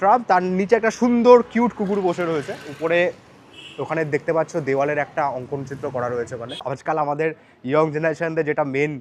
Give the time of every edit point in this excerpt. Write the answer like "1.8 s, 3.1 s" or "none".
6.7 s